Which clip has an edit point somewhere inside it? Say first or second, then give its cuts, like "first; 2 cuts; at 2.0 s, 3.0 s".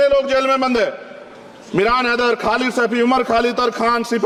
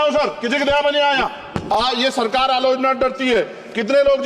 second; 1 cut; at 1.5 s